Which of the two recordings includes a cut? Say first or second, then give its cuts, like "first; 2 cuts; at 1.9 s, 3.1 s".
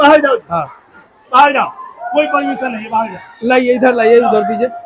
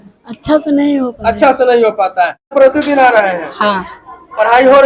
second; 1 cut; at 2.5 s